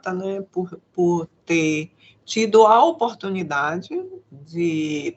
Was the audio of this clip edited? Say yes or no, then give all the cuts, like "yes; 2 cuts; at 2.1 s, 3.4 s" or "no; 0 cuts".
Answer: no; 0 cuts